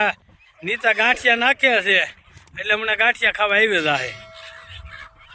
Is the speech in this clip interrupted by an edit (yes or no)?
no